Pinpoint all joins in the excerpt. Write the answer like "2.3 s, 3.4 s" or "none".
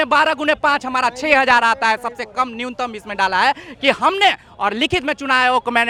none